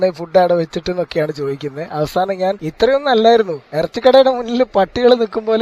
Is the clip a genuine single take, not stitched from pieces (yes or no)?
no